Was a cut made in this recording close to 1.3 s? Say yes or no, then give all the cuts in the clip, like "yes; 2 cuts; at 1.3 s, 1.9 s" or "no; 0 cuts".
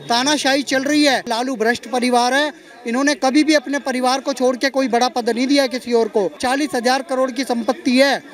yes; 2 cuts; at 1.3 s, 6.4 s